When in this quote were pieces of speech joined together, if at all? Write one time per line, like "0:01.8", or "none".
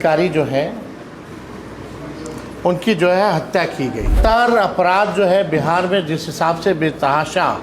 0:04.2